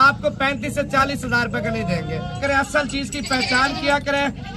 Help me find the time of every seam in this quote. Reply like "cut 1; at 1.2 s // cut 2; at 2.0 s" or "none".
cut 1; at 2.4 s